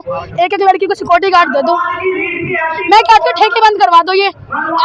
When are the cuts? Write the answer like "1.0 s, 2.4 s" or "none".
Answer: none